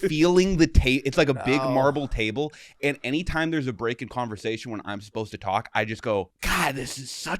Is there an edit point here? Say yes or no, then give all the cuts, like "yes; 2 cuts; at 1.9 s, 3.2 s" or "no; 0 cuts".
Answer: yes; 1 cut; at 6.4 s